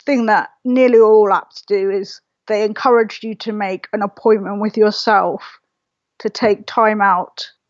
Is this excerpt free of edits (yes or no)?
yes